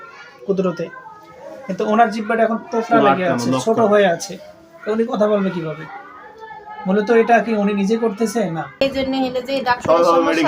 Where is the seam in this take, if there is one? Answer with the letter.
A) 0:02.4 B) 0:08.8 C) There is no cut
B